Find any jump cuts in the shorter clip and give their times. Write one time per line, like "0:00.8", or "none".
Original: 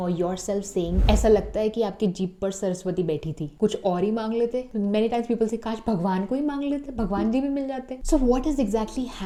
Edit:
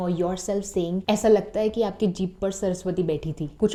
none